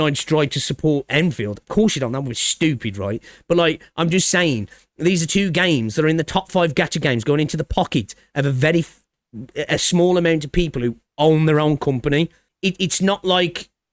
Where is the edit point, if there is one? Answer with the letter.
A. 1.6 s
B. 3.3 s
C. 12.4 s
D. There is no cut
C